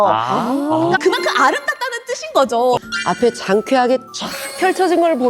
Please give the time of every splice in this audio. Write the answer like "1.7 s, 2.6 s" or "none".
1.0 s, 2.9 s